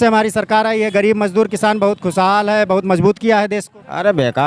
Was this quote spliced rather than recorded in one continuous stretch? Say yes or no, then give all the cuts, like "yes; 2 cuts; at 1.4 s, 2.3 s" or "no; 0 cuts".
no; 0 cuts